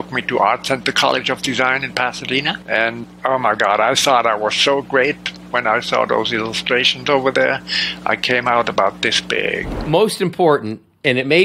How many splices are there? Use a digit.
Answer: 2